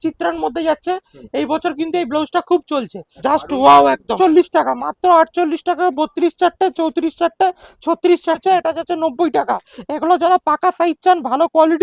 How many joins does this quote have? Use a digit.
3